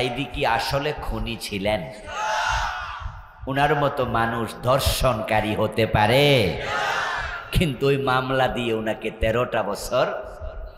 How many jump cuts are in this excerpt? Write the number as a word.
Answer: zero